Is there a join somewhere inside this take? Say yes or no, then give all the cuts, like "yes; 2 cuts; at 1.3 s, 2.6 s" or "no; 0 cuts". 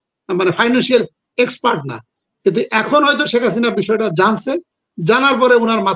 no; 0 cuts